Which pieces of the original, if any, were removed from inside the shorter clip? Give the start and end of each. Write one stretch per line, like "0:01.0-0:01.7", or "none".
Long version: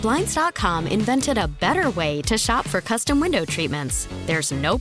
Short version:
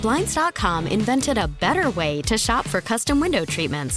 none